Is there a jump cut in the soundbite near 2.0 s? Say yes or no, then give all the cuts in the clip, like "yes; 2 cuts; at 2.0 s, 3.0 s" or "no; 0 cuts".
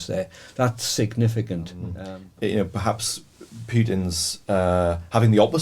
yes; 1 cut; at 2.0 s